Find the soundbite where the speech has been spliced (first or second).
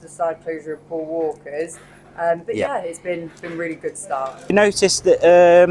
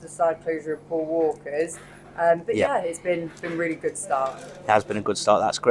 first